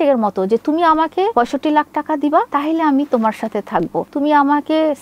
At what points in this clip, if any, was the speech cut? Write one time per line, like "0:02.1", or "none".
0:01.3